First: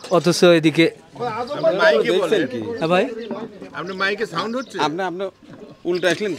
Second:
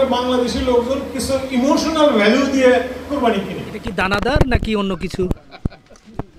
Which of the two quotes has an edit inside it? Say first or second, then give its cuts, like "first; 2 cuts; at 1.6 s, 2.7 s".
second; 1 cut; at 3.8 s